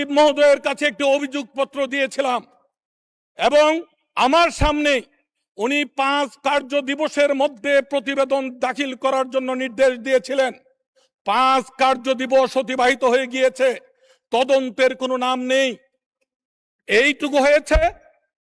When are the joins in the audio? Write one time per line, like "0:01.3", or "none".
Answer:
none